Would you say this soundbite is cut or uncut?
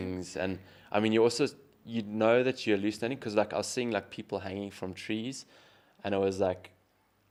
uncut